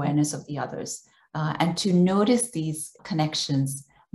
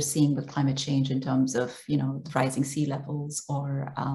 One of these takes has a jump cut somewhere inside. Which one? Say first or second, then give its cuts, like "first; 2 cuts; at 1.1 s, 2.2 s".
first; 1 cut; at 3.0 s